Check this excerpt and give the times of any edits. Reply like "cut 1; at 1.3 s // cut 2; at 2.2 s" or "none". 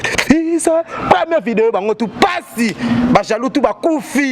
none